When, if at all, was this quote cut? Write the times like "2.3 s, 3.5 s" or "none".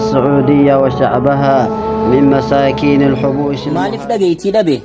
3.7 s